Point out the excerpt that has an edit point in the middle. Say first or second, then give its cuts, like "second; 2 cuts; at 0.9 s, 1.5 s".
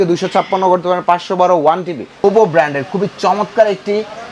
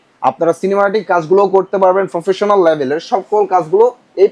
first; 1 cut; at 2.2 s